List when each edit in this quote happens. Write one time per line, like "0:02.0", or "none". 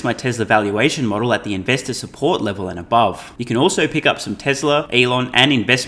0:03.3
0:04.9